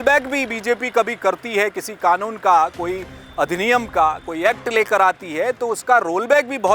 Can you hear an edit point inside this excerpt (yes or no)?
no